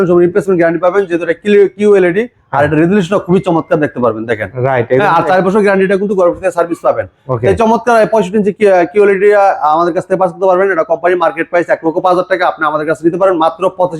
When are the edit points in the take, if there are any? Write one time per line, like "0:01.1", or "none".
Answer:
none